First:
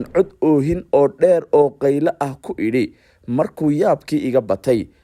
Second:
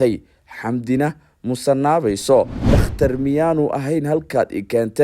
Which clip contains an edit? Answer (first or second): second